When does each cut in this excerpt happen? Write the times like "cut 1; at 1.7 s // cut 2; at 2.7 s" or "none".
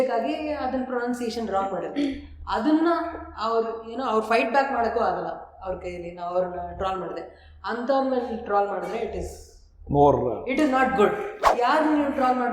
cut 1; at 11.4 s

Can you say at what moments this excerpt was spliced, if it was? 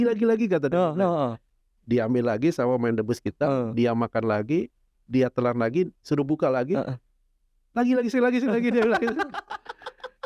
none

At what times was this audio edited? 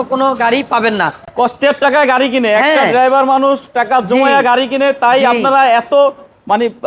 none

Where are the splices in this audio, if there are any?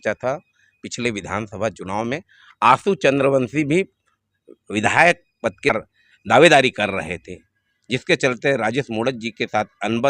cut 1; at 5.7 s

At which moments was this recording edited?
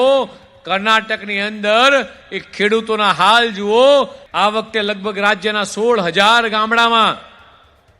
cut 1; at 4.2 s

